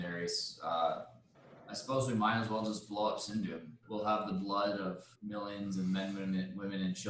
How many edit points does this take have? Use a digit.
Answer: 2